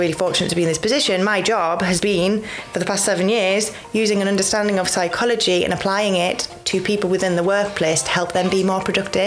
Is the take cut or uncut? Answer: uncut